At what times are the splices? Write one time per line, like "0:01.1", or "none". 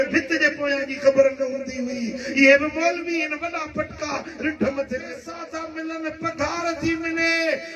0:05.3